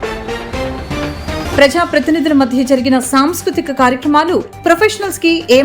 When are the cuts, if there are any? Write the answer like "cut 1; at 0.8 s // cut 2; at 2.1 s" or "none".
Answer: cut 1; at 1.4 s